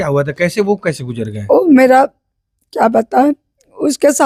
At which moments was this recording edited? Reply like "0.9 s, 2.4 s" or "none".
none

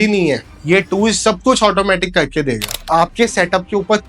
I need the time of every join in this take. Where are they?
2.7 s

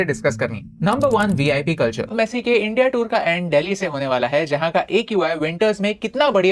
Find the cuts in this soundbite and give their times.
2.3 s

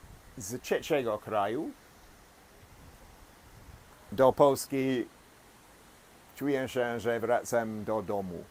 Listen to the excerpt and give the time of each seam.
none

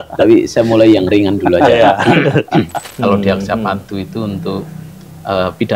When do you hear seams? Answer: 2.8 s

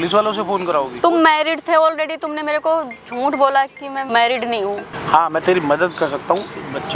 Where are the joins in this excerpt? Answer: 0.9 s, 4.0 s, 4.8 s

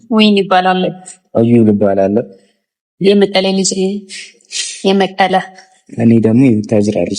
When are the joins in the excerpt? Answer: none

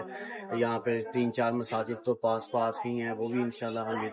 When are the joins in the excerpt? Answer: none

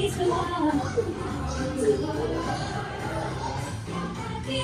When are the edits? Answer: none

